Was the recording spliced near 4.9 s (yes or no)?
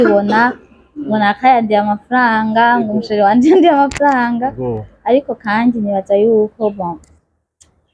no